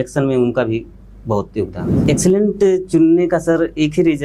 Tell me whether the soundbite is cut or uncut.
cut